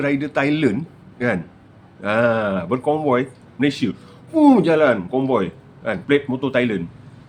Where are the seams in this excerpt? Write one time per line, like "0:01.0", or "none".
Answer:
none